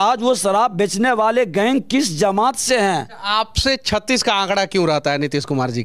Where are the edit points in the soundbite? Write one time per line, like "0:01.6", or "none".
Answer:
0:03.2